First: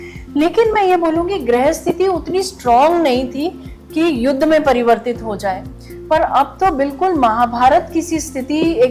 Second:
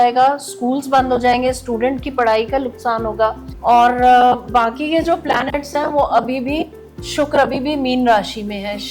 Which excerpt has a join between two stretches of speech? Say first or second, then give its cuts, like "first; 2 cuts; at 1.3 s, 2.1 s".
second; 1 cut; at 3.5 s